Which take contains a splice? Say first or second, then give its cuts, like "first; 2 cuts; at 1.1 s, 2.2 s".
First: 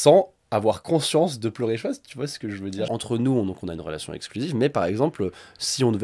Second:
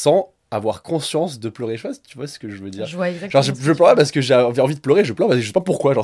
first; 1 cut; at 2.9 s